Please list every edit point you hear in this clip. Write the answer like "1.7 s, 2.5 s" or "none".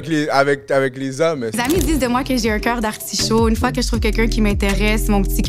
1.6 s